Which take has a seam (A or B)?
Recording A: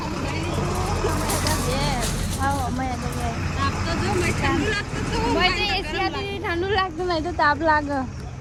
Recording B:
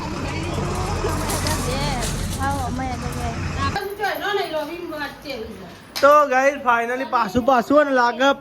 B